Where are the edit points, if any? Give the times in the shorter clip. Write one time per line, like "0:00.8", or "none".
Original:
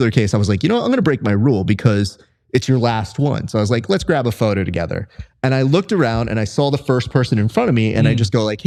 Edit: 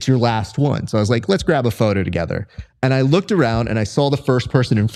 none